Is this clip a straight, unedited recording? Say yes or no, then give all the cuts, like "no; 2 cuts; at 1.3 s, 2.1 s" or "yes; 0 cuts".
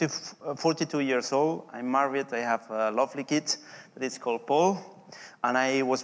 no; 1 cut; at 2.3 s